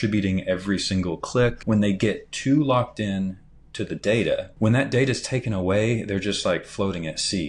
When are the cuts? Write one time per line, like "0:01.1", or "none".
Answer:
0:01.6
0:04.5